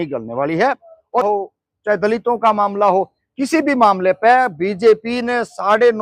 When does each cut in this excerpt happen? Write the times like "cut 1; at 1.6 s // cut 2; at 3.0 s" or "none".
cut 1; at 1.2 s